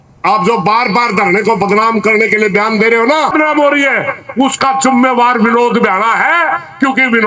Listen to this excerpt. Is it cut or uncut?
cut